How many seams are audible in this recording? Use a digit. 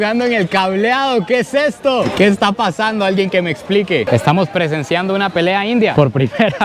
1